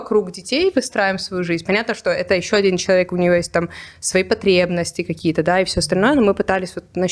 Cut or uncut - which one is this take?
uncut